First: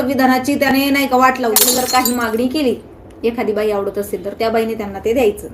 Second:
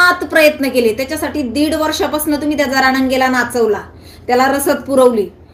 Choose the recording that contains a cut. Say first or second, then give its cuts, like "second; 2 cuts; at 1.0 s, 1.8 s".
first; 1 cut; at 1.6 s